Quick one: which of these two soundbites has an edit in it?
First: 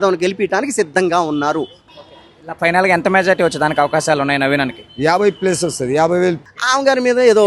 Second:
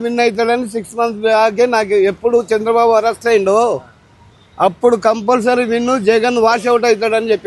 first; 2 cuts; at 1.8 s, 6.4 s

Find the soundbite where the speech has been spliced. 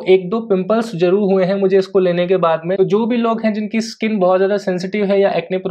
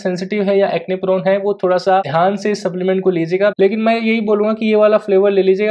second; 2 cuts; at 2.1 s, 3.5 s

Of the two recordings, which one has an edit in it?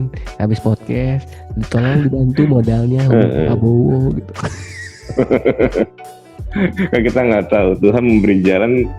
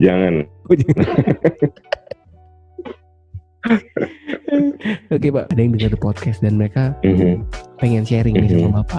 second; 1 cut; at 5.5 s

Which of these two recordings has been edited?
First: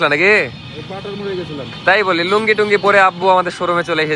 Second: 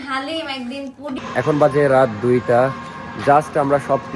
second; 1 cut; at 1.2 s

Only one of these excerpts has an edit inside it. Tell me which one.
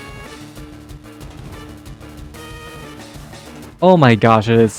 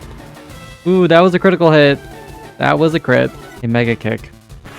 second; 1 cut; at 3.5 s

